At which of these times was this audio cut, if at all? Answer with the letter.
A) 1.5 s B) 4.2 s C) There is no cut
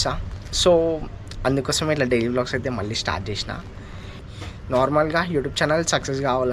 B